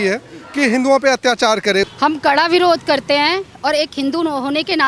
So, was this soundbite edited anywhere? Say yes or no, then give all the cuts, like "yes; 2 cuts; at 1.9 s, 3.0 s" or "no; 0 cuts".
yes; 1 cut; at 1.9 s